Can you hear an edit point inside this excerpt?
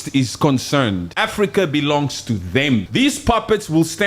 yes; 2 cuts; at 1.1 s, 2.9 s

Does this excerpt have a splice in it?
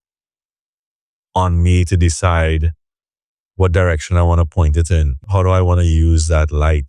yes; 1 cut; at 5.3 s

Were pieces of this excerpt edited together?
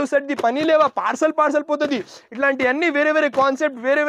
no; 0 cuts

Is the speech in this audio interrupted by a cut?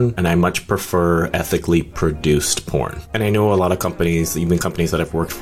yes; 1 cut; at 3.0 s

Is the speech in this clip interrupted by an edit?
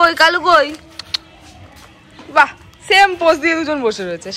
no; 0 cuts

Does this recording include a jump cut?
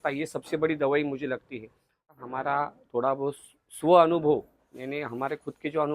yes; 1 cut; at 2.1 s

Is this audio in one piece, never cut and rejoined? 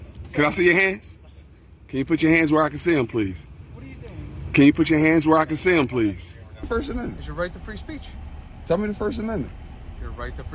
no; 1 cut; at 6.7 s

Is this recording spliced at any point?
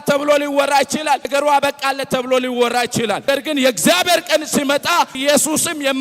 yes; 3 cuts; at 1.3 s, 3.2 s, 5.2 s

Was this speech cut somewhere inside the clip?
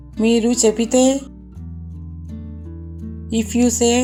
no; 0 cuts

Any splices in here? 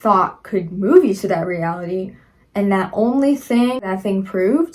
yes; 1 cut; at 3.8 s

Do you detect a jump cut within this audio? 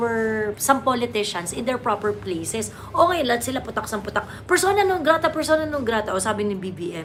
no; 0 cuts

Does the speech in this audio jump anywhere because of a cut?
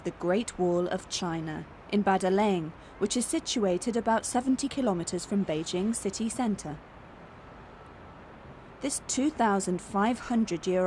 yes; 1 cut; at 6.3 s

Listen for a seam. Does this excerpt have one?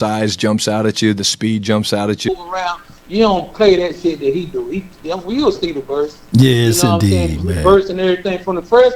yes; 1 cut; at 2.3 s

